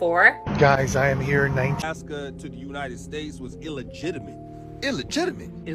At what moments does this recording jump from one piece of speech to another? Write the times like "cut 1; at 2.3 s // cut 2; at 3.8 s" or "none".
cut 1; at 1.8 s